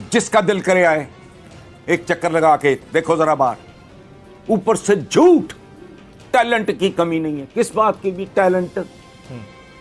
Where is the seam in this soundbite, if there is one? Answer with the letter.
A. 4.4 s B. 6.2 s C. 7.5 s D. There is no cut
D